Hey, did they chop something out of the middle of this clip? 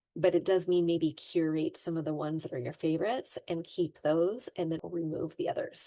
yes; 1 cut; at 4.8 s

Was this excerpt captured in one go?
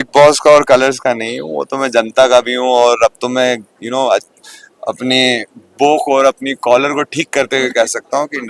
yes; 0 cuts

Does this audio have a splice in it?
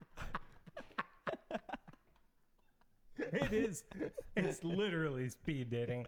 no; 0 cuts

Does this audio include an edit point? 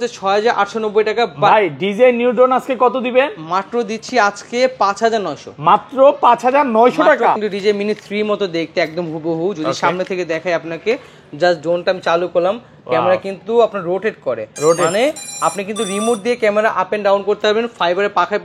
yes; 1 cut; at 7.3 s

